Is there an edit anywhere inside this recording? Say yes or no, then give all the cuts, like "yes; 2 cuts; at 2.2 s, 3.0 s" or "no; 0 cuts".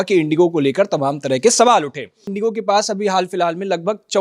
yes; 1 cut; at 2.2 s